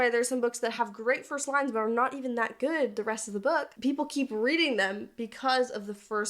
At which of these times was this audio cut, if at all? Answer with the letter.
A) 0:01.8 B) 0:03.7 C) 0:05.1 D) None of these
B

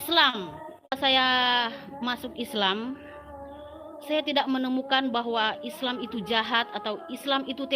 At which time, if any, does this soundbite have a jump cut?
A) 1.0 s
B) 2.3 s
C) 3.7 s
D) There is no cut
A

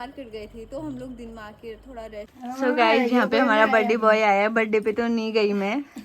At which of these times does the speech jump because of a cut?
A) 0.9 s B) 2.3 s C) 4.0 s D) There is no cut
B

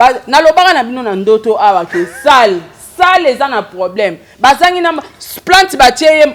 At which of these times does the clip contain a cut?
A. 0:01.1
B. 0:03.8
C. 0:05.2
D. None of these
D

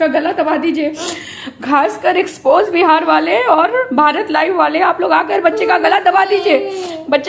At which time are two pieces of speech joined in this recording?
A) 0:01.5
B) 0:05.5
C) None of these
C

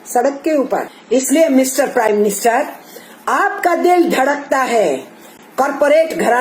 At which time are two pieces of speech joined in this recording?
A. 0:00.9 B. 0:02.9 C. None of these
A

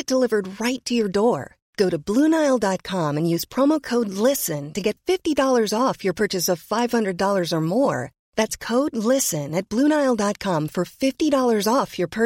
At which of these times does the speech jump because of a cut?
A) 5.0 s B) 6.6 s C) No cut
C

